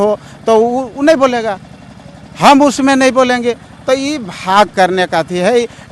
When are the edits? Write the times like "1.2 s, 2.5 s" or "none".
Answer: none